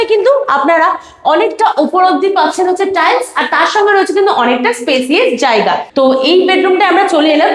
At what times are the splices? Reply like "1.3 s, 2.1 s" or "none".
5.9 s